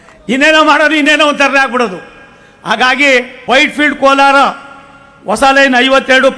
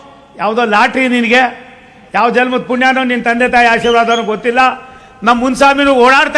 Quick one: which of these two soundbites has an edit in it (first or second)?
first